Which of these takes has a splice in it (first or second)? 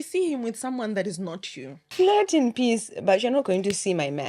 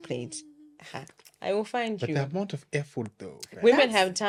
first